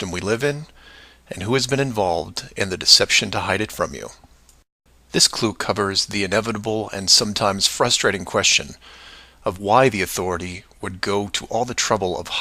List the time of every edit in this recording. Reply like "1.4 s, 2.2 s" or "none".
none